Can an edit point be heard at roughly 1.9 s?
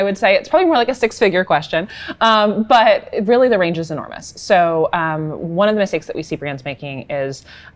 no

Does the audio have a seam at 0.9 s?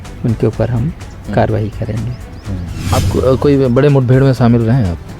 no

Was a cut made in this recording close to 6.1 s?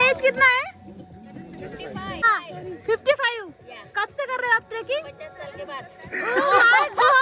no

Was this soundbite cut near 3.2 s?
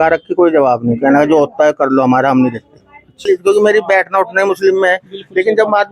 yes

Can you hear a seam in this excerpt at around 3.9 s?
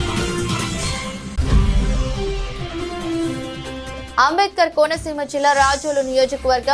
yes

